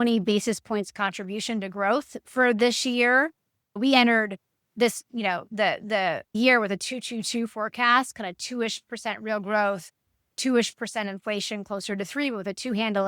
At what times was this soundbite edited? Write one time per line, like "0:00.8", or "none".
0:03.7
0:06.4